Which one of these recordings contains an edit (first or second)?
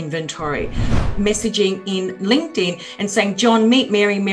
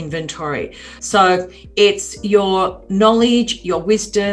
first